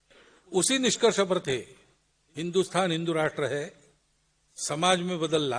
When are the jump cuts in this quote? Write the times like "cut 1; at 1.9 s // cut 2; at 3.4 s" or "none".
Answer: none